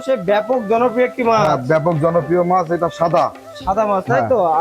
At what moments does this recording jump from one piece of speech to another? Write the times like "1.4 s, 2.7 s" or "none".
none